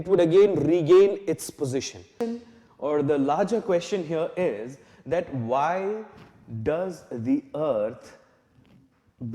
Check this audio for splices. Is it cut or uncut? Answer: cut